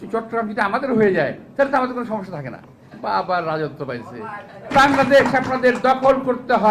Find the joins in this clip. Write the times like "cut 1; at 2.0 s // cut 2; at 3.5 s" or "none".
cut 1; at 4.7 s